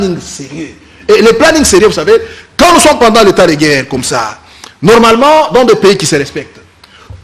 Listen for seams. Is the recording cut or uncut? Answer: cut